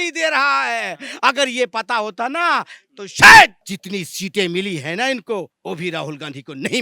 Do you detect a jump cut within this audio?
yes; 2 cuts; at 3.7 s, 5.5 s

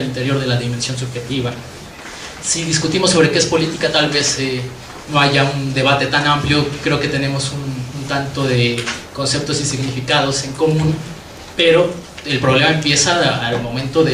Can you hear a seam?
yes; 1 cut; at 11.4 s

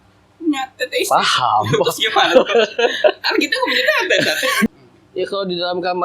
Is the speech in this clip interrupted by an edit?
yes; 1 cut; at 4.7 s

